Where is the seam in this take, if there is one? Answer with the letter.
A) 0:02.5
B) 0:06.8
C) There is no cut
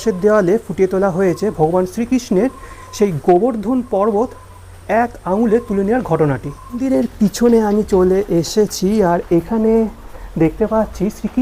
B